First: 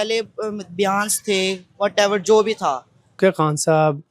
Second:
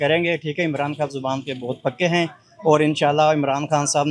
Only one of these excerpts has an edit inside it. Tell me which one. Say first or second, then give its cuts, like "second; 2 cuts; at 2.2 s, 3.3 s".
first; 1 cut; at 3.2 s